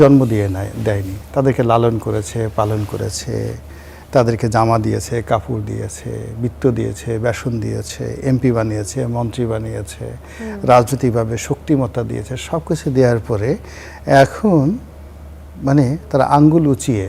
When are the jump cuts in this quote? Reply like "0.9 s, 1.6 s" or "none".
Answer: none